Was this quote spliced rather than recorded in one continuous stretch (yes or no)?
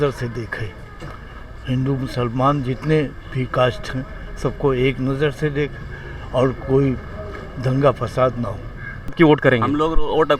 yes